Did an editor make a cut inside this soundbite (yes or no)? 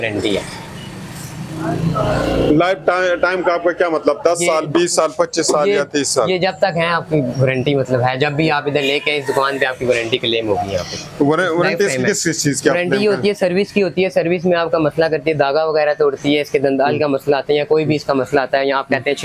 no